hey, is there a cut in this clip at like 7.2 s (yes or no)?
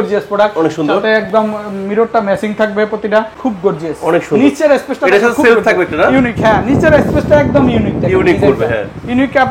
no